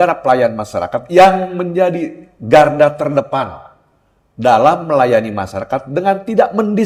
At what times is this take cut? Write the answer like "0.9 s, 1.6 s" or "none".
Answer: none